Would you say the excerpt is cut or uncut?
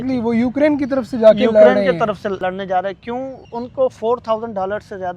cut